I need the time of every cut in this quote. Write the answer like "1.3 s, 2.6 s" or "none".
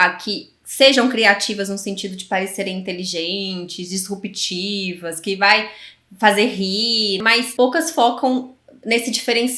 7.2 s